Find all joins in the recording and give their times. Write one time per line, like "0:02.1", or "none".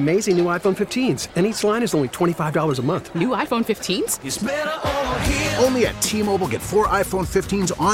none